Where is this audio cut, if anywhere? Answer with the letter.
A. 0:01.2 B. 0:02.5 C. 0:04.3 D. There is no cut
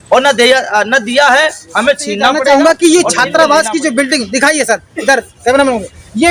B